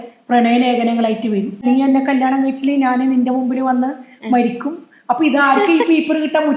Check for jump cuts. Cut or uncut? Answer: cut